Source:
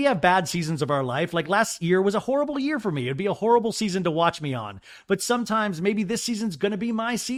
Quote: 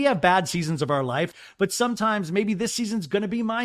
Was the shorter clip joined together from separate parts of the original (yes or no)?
yes